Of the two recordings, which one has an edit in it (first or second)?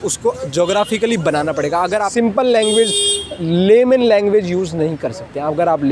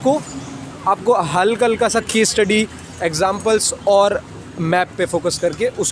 first